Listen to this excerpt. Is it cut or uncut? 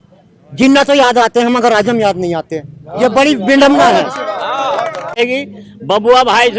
cut